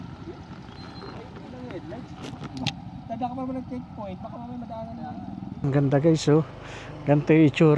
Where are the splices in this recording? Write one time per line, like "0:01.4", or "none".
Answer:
0:05.7